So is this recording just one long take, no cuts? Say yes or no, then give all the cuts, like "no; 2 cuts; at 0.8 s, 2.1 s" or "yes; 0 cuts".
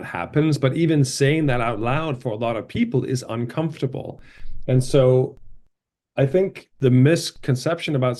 yes; 0 cuts